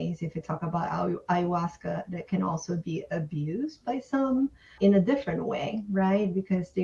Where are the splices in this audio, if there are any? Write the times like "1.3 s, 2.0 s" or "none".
4.7 s